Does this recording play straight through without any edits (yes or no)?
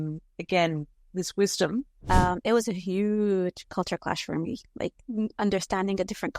no